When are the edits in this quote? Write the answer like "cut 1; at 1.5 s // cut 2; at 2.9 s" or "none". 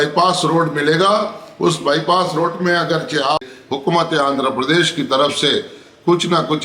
cut 1; at 3.4 s